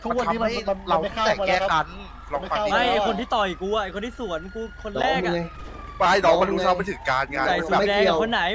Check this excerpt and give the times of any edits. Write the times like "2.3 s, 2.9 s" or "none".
none